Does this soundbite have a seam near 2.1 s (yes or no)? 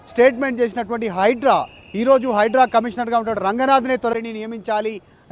no